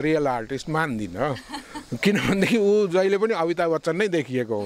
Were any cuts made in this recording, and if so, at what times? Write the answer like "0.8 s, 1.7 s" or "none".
none